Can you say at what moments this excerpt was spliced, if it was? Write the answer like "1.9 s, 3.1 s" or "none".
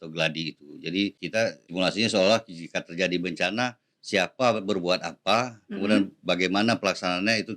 1.7 s